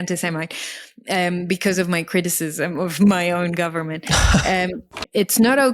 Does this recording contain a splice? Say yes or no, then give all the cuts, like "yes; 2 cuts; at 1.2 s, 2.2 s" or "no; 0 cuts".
yes; 1 cut; at 4.8 s